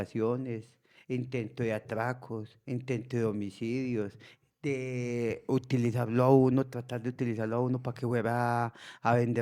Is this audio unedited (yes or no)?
yes